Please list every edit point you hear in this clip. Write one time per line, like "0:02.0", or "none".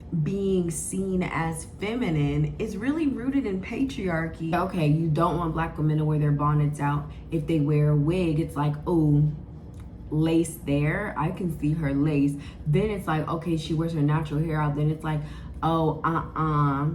0:04.5